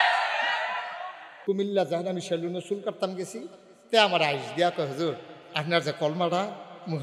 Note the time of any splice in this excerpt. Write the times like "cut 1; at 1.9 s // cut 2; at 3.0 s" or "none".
cut 1; at 1.4 s